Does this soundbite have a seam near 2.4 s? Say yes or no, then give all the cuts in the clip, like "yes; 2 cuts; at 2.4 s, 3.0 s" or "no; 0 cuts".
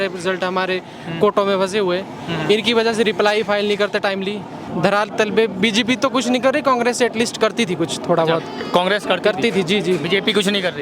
no; 1 cut; at 4.6 s